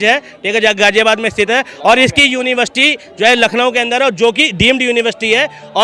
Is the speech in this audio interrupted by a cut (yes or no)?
no